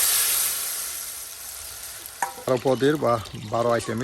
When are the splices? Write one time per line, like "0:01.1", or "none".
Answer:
0:02.5